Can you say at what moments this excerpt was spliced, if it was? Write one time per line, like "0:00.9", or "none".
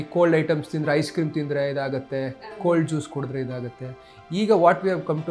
none